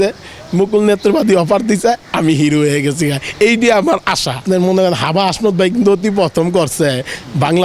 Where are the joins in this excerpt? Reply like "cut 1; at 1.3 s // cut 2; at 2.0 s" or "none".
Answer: cut 1; at 4.4 s